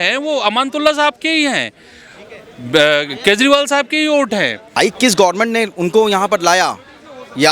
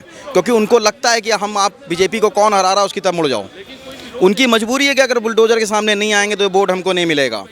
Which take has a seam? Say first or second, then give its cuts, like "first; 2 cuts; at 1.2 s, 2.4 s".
first; 1 cut; at 4.6 s